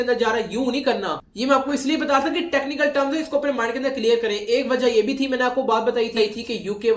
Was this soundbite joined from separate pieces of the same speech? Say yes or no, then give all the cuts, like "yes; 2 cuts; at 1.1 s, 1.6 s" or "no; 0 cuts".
no; 0 cuts